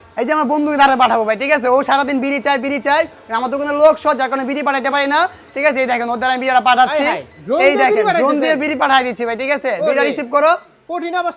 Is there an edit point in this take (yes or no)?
no